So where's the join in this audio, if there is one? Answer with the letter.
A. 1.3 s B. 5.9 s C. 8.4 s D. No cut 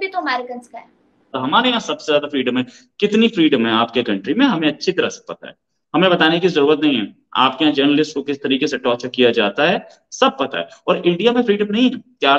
A